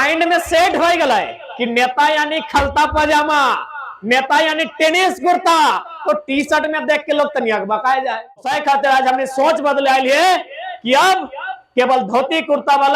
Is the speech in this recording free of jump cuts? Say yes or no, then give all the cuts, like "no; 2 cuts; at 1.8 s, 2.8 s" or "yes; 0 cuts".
no; 1 cut; at 8.5 s